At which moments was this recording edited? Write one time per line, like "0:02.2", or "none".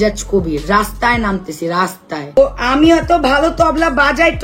0:02.4